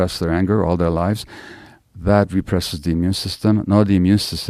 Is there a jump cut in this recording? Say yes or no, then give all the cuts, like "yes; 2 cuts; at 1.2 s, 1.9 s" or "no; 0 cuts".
no; 0 cuts